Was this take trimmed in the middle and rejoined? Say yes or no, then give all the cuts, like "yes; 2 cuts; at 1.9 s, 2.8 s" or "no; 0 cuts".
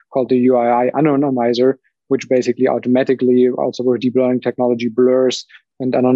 no; 0 cuts